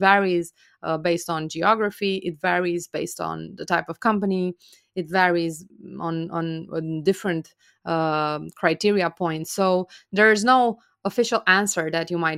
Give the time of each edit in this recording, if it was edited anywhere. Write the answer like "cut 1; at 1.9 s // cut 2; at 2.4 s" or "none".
none